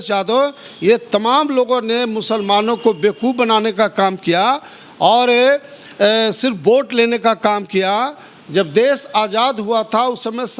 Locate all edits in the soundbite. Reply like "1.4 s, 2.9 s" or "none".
none